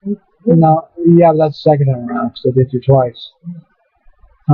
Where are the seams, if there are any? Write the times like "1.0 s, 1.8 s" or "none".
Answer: 2.9 s